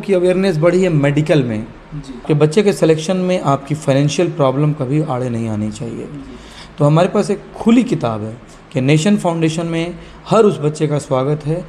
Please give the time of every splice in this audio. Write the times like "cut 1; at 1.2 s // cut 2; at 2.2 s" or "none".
cut 1; at 2.2 s